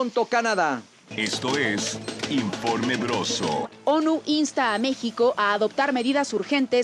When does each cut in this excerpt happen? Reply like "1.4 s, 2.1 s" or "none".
1.1 s, 3.7 s